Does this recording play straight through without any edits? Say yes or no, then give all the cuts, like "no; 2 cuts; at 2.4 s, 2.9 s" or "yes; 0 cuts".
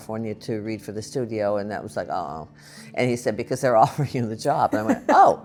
yes; 0 cuts